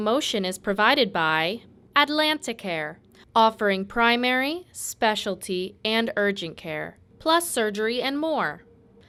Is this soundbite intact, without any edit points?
yes; 0 cuts

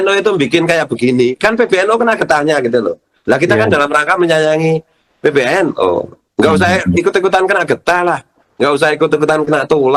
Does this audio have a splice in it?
no; 0 cuts

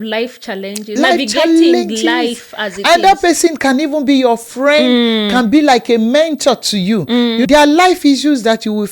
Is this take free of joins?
no; 1 cut; at 7.5 s

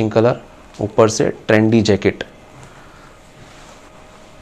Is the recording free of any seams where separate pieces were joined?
yes; 0 cuts

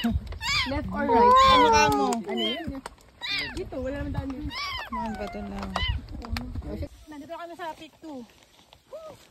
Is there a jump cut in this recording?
yes; 1 cut; at 7.0 s

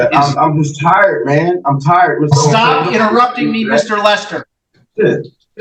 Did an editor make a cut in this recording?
no; 0 cuts

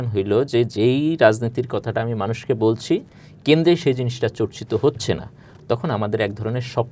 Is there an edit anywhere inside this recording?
no; 0 cuts

